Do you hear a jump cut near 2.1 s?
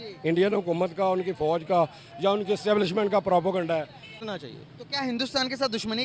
no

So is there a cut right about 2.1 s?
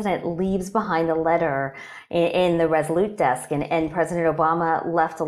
no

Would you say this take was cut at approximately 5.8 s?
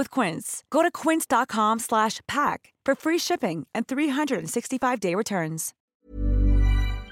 yes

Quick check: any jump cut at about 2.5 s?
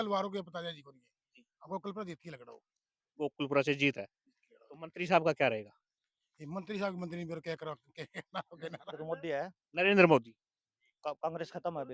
no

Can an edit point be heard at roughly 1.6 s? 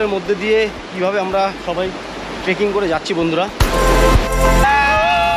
no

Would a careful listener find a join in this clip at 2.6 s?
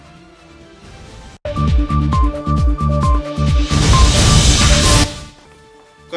no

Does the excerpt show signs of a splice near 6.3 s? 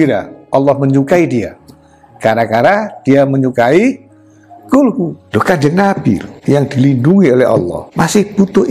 yes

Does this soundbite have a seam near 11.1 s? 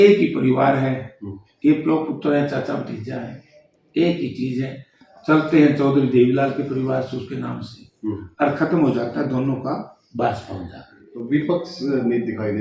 yes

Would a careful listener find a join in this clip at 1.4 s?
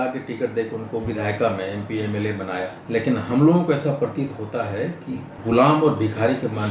no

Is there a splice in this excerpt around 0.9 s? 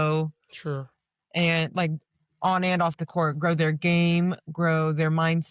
no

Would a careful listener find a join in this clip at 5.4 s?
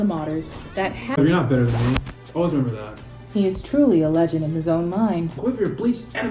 yes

